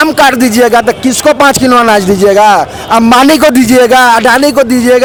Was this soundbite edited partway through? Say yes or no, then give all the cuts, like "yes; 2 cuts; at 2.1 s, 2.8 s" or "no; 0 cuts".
no; 0 cuts